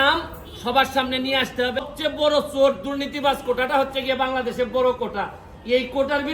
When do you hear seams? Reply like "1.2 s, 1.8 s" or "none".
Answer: 1.9 s